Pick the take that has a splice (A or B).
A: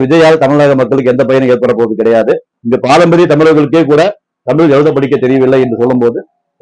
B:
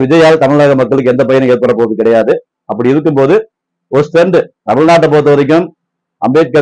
A